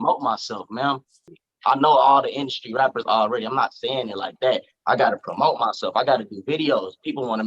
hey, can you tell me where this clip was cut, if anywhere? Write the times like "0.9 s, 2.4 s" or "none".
1.2 s